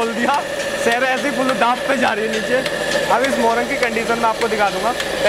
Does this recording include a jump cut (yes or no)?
no